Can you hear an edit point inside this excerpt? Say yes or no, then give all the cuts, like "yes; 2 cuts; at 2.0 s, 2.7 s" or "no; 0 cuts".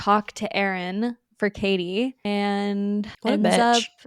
yes; 2 cuts; at 2.2 s, 3.1 s